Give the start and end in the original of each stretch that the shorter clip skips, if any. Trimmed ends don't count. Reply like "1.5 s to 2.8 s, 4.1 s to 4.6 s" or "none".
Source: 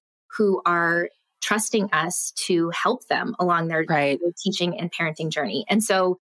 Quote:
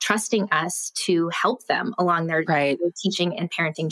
none